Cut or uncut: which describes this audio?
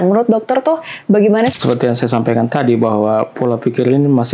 cut